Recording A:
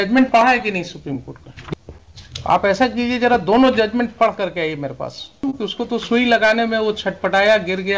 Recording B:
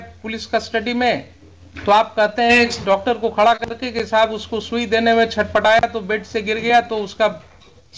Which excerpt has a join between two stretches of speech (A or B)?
A